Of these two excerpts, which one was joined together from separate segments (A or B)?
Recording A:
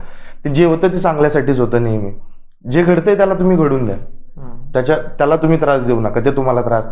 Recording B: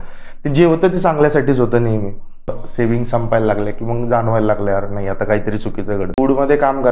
B